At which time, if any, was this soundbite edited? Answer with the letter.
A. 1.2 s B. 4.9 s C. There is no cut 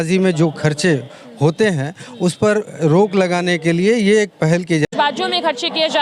B